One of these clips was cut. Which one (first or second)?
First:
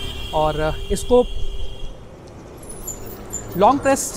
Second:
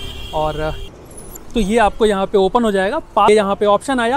second